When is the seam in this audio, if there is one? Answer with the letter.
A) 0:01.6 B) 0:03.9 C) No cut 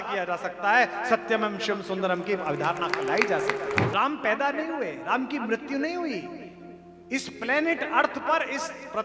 B